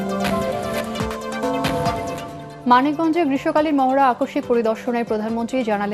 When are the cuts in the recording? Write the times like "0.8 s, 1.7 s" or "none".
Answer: 2.3 s